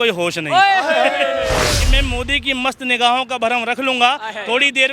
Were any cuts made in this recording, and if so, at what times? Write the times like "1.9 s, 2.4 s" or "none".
1.8 s